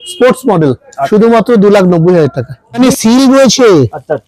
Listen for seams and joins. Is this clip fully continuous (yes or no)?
no